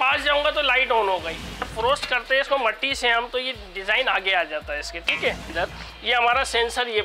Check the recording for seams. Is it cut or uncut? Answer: cut